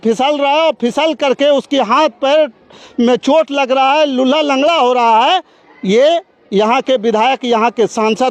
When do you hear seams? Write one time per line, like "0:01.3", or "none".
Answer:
none